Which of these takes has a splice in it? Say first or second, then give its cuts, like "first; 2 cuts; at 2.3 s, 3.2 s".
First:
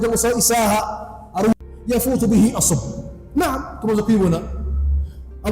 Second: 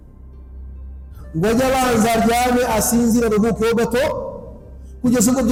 first; 1 cut; at 1.5 s